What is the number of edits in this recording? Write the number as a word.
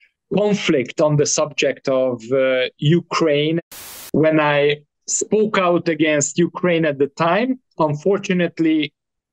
one